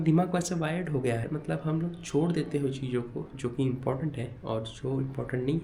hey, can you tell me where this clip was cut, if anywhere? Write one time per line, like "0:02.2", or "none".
0:01.2

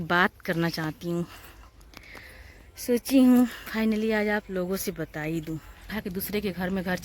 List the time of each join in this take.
0:05.9

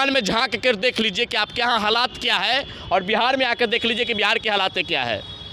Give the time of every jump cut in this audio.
none

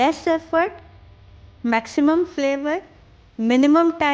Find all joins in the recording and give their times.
none

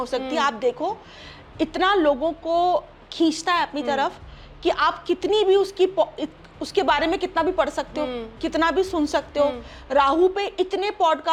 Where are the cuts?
none

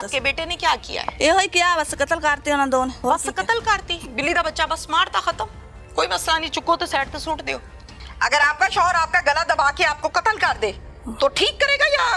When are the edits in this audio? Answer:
0:01.1
0:03.0
0:07.9

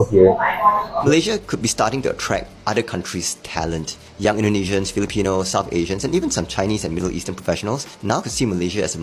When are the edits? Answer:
0:00.9

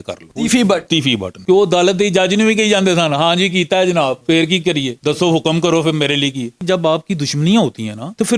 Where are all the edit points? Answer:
0:01.4
0:06.5

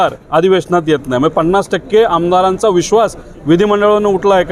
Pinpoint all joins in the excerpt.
none

